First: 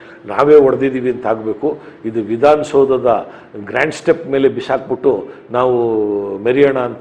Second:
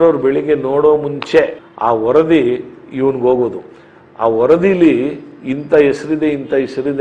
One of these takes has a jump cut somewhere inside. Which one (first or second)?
second